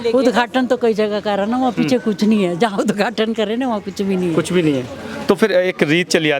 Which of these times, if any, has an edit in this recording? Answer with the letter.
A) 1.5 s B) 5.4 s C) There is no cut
C